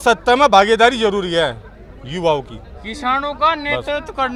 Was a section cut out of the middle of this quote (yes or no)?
no